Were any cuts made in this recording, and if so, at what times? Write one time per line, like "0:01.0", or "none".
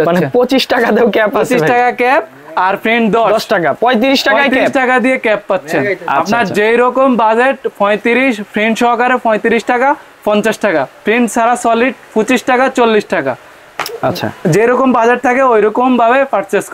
none